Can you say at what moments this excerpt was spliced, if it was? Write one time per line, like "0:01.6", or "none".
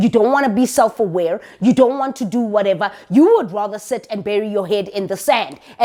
none